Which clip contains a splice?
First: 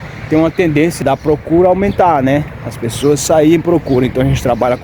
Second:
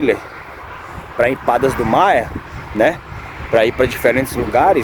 first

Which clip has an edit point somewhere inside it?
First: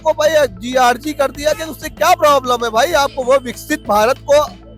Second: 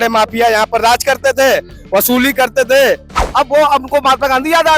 second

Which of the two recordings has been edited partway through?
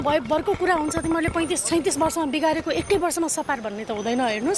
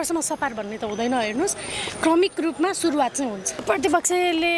second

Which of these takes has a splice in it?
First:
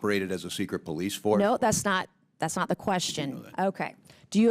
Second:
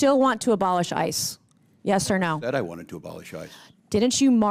first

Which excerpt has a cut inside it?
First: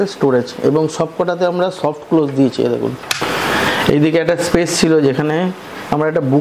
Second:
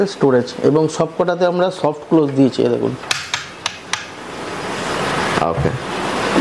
first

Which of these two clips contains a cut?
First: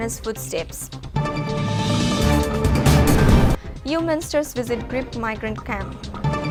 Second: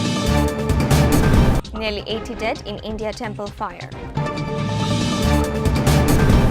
second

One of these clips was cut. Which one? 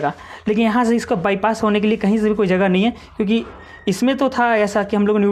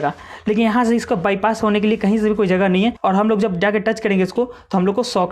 second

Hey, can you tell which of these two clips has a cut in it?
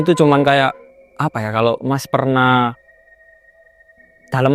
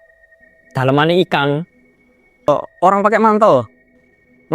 second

